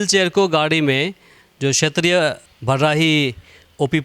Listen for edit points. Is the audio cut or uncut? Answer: cut